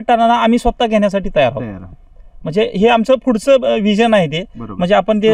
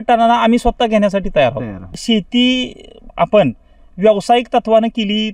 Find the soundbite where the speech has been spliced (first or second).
second